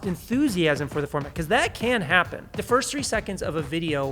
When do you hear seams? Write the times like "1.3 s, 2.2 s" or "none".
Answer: 2.6 s